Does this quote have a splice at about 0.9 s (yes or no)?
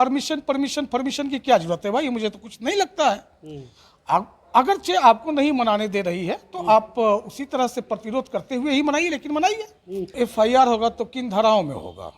no